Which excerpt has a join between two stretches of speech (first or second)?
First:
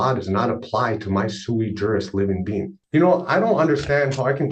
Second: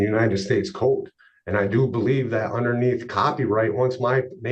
first